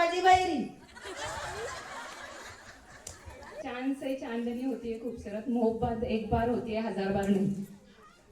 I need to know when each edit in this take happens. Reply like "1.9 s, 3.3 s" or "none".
3.6 s